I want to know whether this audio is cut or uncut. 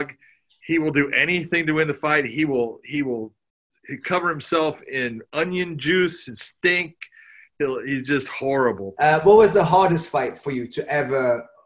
cut